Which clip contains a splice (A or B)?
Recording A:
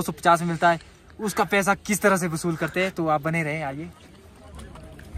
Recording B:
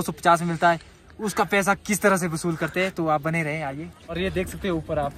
B